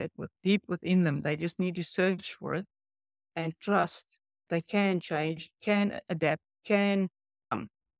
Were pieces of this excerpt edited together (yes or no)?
yes